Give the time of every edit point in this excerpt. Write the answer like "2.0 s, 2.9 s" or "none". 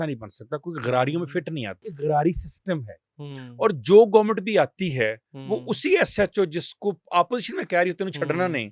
1.8 s